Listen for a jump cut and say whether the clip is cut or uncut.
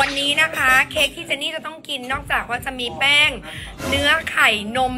uncut